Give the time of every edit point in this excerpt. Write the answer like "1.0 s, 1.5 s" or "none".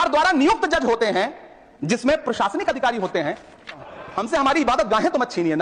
3.9 s